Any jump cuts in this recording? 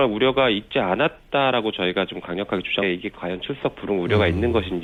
no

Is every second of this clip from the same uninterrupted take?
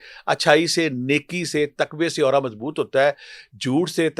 yes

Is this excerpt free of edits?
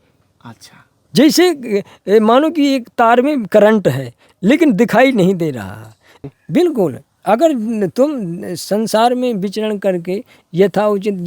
no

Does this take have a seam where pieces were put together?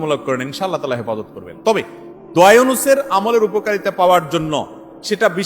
no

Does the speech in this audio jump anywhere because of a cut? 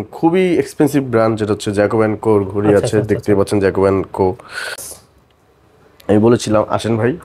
yes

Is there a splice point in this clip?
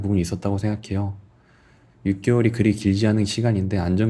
no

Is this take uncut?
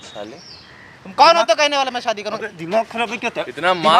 yes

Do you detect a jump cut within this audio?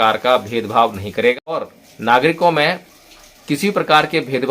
yes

